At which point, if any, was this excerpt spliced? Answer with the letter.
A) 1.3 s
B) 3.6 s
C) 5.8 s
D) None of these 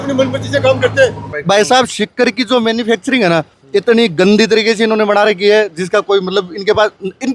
A